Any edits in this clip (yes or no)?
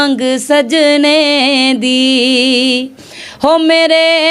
no